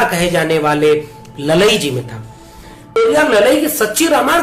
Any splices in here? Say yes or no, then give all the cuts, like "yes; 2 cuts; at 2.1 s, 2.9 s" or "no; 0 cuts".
yes; 1 cut; at 3.0 s